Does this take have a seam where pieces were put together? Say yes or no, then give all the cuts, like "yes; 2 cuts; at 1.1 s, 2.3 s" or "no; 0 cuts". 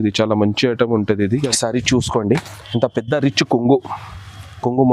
yes; 1 cut; at 1.4 s